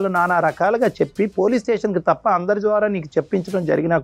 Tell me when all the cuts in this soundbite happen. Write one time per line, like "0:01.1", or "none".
none

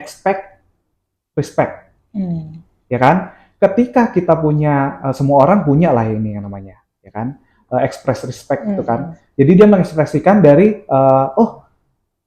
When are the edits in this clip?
none

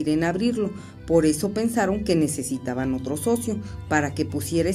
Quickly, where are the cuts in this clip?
0:03.8

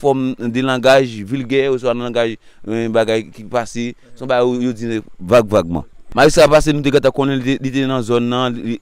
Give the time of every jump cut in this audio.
0:06.0

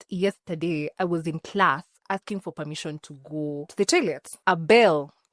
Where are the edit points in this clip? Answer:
0:03.7
0:04.3

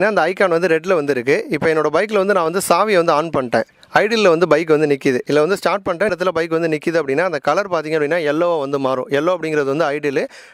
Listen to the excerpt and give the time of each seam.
none

